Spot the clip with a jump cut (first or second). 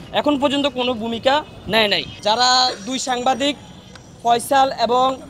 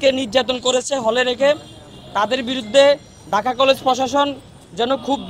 first